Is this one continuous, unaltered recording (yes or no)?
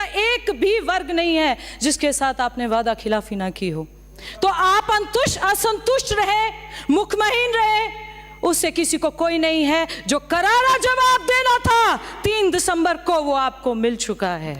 yes